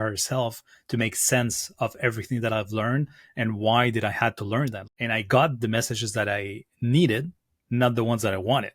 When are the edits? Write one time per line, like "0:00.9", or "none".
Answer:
0:04.8

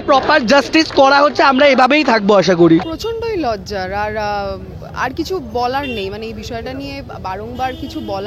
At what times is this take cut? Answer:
none

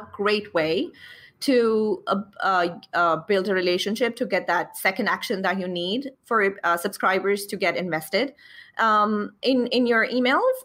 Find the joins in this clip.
none

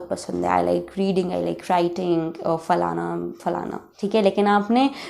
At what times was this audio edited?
0:03.8

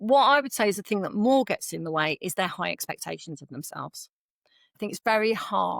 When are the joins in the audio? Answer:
0:04.8

